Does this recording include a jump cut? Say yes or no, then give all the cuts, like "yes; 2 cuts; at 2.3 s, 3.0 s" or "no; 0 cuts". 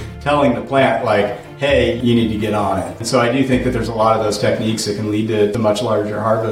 yes; 3 cuts; at 2.0 s, 3.0 s, 5.5 s